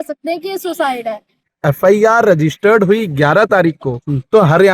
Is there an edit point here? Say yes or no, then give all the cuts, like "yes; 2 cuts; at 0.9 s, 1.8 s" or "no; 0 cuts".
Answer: yes; 1 cut; at 1.4 s